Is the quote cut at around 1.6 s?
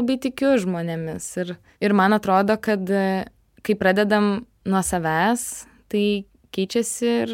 yes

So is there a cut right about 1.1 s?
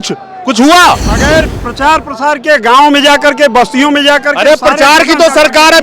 yes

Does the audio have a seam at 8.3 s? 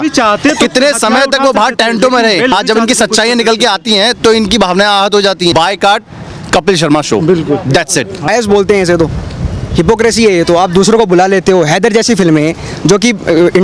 yes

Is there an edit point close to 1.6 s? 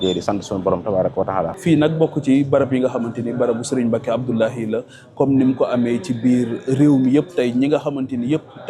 yes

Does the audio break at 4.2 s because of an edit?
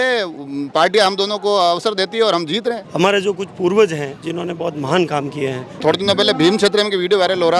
no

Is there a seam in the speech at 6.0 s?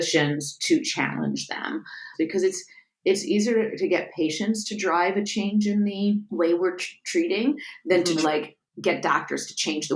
no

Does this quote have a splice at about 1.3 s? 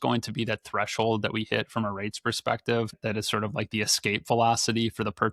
no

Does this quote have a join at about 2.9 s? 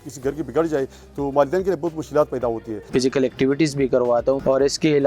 yes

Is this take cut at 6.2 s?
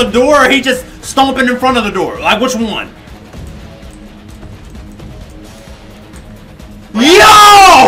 no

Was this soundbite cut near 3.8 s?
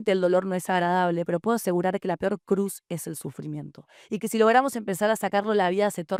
no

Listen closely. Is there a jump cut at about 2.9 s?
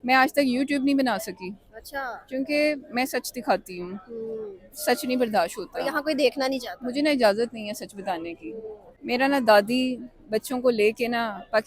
no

